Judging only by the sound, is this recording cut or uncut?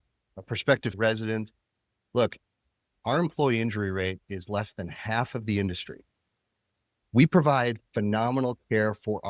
cut